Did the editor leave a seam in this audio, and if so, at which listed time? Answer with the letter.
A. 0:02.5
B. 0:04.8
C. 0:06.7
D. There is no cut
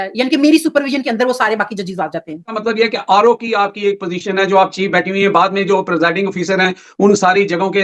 A